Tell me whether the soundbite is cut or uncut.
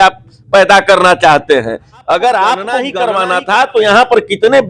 cut